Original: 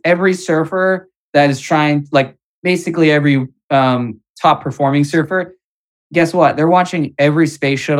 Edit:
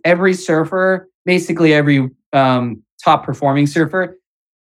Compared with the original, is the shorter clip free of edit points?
no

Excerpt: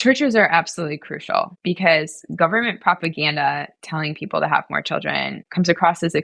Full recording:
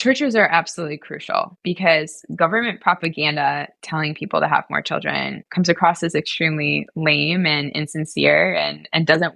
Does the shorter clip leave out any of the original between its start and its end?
no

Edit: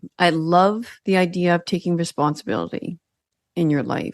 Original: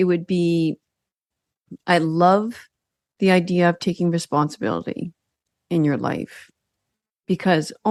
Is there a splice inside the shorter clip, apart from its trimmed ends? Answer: yes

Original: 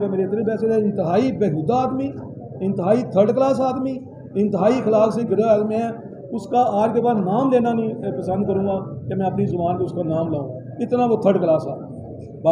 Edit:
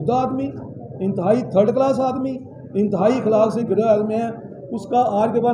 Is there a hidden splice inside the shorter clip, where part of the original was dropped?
no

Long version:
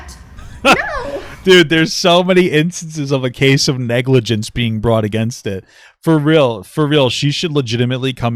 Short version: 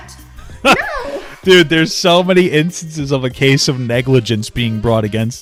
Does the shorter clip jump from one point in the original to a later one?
no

